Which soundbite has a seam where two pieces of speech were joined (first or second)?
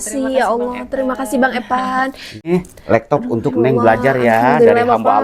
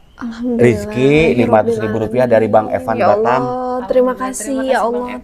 first